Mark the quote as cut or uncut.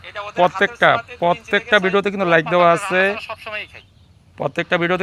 uncut